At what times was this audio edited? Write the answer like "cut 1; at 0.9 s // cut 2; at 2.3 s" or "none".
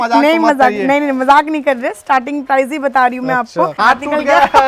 cut 1; at 3.7 s